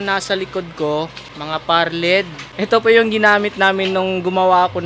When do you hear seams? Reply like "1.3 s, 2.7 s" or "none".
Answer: 1.3 s, 2.4 s